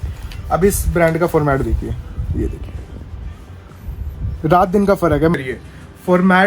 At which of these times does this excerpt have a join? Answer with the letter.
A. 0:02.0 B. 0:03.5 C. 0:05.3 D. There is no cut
C